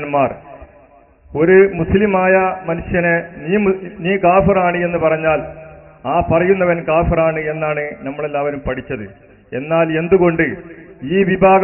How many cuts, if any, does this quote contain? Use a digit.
0